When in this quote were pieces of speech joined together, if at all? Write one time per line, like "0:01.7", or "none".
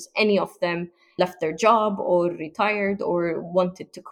none